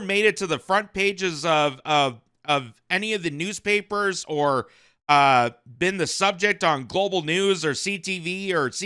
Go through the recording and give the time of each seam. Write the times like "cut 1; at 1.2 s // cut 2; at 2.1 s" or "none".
none